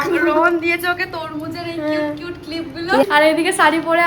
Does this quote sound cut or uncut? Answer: cut